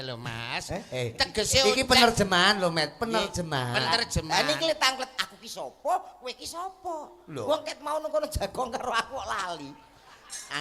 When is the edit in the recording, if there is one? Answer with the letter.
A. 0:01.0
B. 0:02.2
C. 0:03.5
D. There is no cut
D